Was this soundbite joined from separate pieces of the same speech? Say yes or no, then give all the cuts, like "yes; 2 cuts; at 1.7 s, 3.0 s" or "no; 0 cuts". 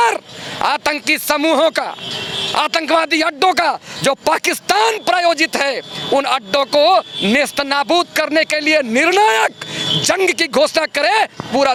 no; 0 cuts